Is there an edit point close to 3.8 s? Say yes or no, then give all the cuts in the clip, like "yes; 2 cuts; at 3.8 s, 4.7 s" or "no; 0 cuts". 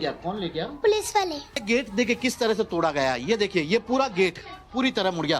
no; 1 cut; at 1.6 s